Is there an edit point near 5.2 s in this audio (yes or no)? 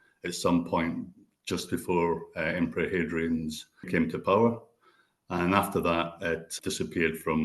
no